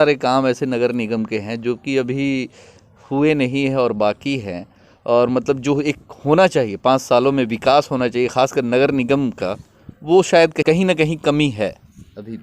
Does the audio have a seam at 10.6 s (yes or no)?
yes